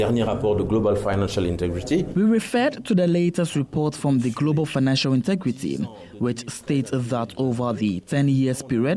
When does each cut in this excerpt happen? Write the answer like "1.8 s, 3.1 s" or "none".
none